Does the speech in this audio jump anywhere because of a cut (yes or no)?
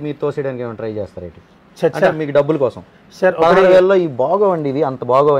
no